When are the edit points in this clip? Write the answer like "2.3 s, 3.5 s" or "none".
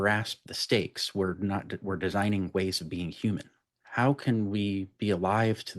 3.8 s